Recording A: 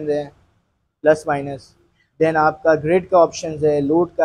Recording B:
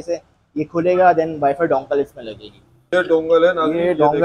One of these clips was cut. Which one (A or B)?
B